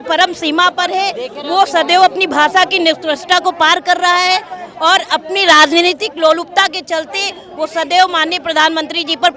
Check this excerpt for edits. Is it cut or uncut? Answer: uncut